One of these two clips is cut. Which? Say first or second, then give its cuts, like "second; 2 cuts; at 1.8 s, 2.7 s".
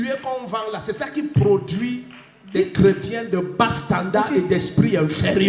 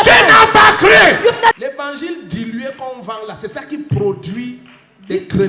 second; 1 cut; at 1.5 s